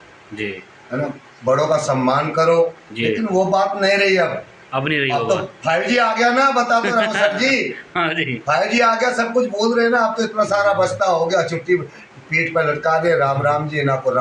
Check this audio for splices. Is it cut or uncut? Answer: uncut